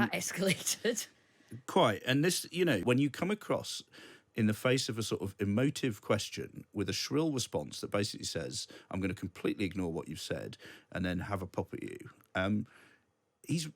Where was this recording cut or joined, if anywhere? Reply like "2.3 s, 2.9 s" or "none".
2.8 s